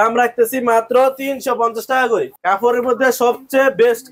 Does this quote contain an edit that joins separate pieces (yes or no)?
yes